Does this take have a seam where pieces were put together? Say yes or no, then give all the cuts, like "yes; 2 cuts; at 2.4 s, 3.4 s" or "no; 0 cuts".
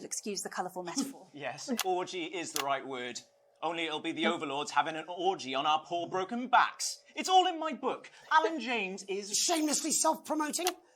no; 0 cuts